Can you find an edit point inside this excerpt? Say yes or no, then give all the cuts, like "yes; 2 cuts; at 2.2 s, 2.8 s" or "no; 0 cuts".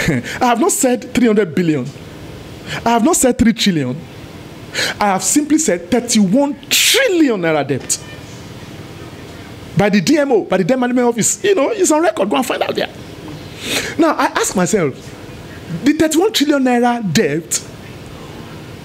no; 0 cuts